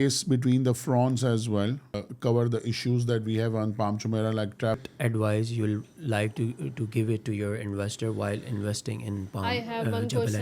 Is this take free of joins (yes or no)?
no